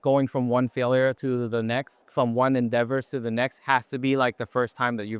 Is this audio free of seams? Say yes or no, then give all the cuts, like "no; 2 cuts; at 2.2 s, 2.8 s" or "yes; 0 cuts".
yes; 0 cuts